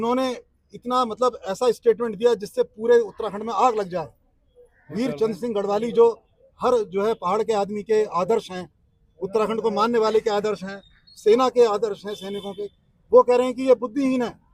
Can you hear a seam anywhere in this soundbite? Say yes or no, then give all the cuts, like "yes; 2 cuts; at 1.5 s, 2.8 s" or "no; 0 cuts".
no; 0 cuts